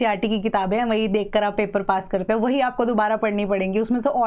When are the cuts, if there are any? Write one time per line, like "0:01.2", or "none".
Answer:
none